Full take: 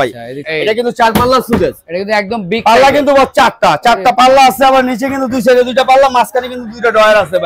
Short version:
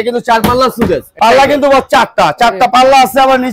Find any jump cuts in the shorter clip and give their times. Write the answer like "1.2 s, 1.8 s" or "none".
1.1 s